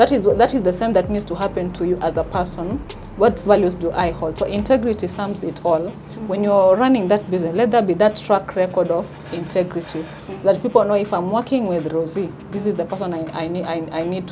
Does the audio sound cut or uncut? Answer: uncut